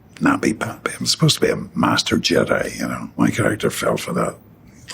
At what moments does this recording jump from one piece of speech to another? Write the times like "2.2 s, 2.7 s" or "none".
3.1 s